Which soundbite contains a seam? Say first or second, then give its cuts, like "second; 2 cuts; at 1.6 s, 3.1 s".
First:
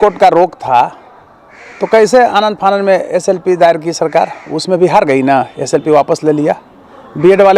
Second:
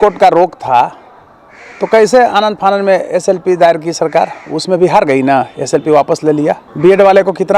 second; 1 cut; at 6.7 s